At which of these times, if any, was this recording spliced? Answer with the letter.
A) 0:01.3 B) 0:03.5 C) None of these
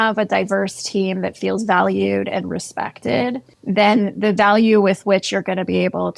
B